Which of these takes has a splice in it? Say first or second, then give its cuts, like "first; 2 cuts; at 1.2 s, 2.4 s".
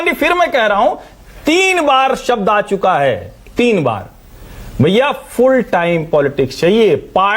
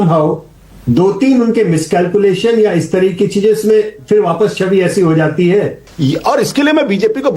second; 1 cut; at 5.6 s